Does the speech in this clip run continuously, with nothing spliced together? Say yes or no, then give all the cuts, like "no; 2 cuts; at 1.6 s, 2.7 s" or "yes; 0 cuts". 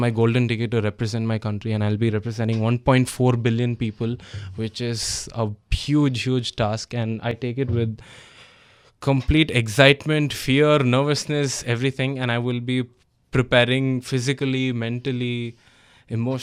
yes; 0 cuts